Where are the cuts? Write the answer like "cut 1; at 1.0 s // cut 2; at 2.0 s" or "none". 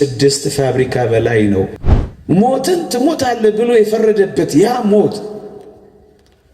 cut 1; at 1.8 s